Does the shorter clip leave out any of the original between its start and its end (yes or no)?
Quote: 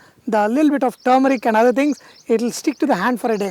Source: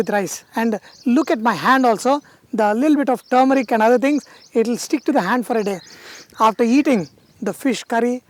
no